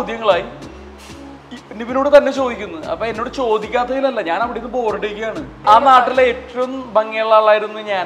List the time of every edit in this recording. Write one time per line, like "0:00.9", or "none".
0:05.6